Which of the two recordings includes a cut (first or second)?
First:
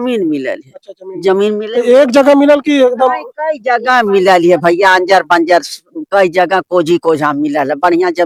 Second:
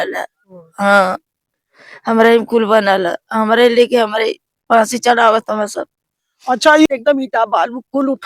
second